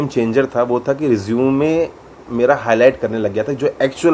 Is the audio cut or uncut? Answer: uncut